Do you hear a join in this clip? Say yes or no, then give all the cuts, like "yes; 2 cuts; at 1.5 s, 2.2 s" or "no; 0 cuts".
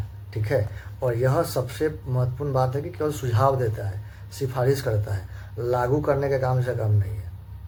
no; 0 cuts